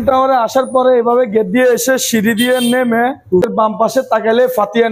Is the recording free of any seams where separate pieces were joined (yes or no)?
no